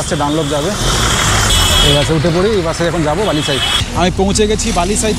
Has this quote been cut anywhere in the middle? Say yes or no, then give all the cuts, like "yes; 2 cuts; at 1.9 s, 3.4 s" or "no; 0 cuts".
yes; 2 cuts; at 1.5 s, 3.8 s